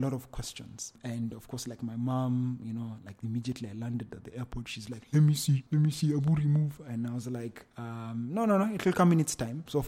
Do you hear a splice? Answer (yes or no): no